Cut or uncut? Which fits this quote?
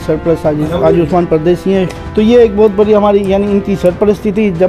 cut